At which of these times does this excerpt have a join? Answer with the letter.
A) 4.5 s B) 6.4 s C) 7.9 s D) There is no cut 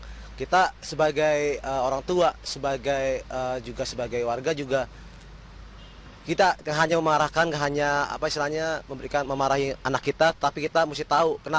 A